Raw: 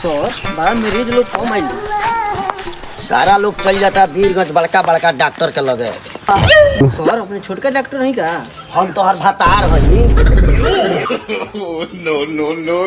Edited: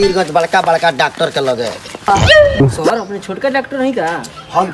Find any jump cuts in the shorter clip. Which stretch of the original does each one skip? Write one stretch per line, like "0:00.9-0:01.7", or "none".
none